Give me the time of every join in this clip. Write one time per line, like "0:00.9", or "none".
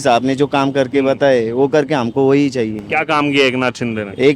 none